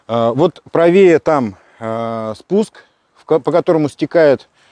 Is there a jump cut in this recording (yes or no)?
no